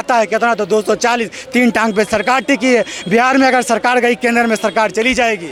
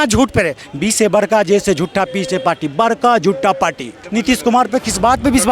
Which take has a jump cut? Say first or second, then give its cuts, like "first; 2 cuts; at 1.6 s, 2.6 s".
second; 1 cut; at 4.0 s